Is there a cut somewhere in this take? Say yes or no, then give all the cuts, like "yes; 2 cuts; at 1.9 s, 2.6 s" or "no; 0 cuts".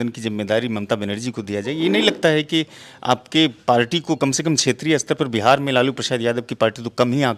no; 0 cuts